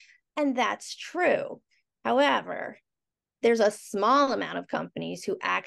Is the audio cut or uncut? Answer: uncut